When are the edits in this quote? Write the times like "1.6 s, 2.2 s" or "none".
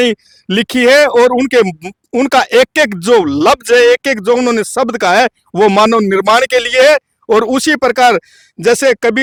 none